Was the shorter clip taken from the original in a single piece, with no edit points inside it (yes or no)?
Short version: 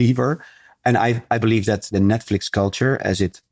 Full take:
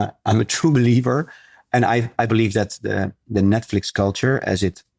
no